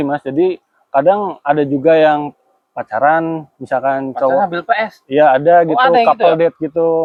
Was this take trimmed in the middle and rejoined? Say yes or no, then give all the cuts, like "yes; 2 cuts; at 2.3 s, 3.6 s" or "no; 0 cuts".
no; 0 cuts